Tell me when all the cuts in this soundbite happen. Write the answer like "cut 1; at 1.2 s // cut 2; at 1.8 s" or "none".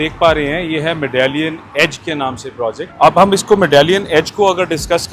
none